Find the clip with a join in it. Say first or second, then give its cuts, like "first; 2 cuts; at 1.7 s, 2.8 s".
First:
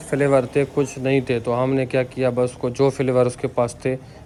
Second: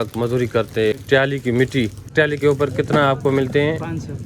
second; 2 cuts; at 1.0 s, 2.1 s